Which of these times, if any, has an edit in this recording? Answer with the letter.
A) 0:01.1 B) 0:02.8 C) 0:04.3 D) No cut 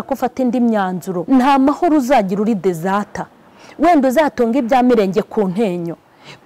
A